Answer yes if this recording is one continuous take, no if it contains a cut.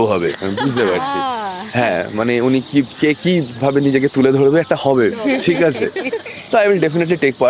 yes